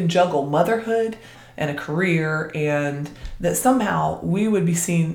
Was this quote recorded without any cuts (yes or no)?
no